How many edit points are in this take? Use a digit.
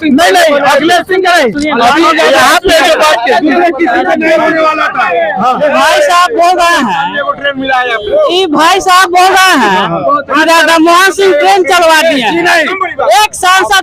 0